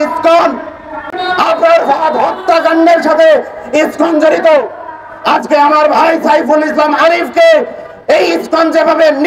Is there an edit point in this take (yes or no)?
yes